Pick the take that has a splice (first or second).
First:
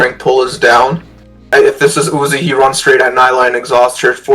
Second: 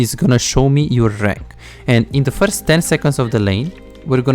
first